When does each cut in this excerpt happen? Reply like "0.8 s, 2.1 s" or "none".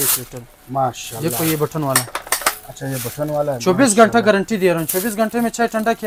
none